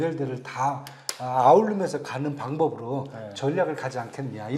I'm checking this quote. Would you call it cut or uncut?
uncut